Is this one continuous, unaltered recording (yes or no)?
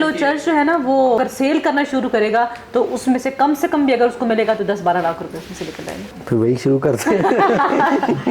no